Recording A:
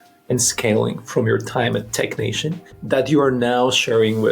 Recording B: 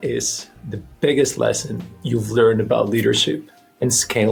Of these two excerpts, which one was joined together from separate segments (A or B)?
A